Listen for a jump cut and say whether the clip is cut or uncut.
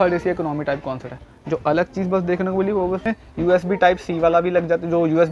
cut